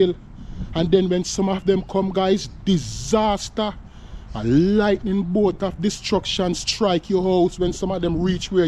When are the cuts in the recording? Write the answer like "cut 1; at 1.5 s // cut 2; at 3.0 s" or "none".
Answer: none